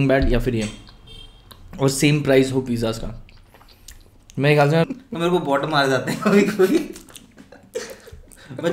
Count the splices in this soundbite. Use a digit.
1